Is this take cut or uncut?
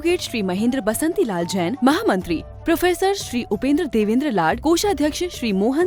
uncut